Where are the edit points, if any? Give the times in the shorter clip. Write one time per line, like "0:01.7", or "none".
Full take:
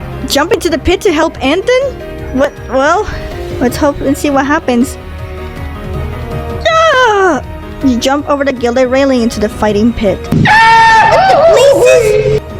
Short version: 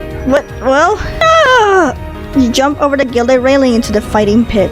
0:01.2

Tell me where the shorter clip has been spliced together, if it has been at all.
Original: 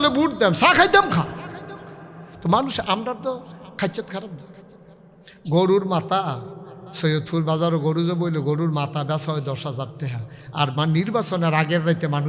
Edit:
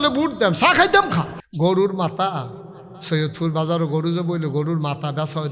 0:01.4

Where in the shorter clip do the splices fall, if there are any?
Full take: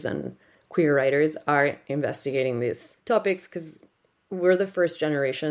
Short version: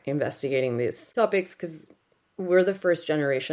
0:01.0

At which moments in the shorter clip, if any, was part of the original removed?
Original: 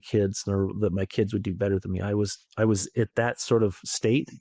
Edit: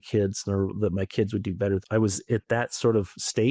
0:01.8

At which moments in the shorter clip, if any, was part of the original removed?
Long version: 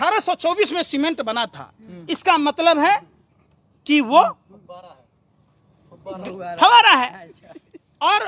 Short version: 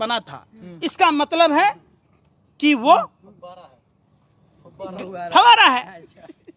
none

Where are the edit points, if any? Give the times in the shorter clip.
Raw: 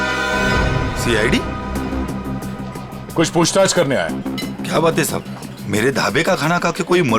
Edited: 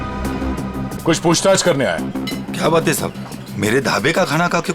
0:00.9

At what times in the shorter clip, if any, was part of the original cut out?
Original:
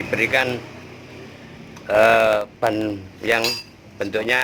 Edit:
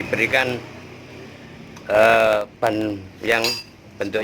none

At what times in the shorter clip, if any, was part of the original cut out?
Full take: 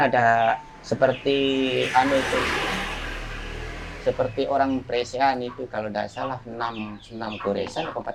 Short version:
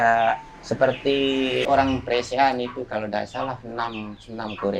0:01.7

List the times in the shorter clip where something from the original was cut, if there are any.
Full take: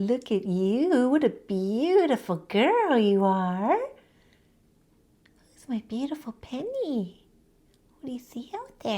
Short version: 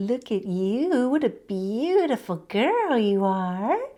none

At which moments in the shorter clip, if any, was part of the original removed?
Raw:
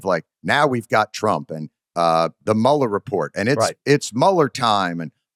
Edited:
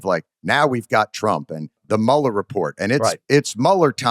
0:01.8

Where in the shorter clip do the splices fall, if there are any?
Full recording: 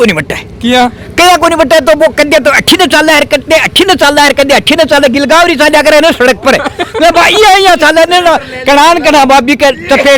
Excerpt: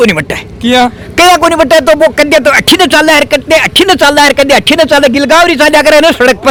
none

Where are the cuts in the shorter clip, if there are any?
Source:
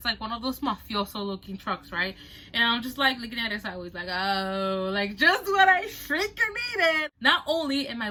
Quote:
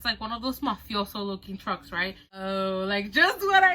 0:02.4

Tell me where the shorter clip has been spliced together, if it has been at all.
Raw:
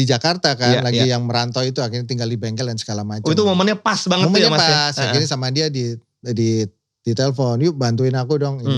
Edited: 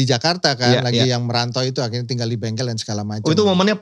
none

